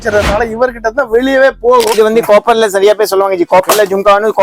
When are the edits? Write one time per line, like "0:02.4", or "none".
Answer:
0:01.9